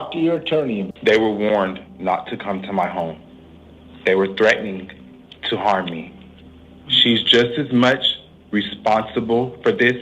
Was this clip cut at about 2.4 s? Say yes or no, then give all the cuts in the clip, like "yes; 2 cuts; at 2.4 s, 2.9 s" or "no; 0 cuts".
no; 1 cut; at 0.9 s